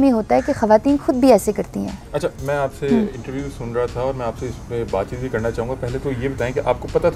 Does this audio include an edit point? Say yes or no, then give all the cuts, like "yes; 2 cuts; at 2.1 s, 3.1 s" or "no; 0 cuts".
no; 0 cuts